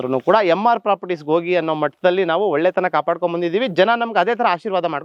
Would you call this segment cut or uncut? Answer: uncut